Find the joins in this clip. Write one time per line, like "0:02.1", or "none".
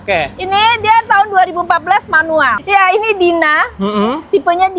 0:02.6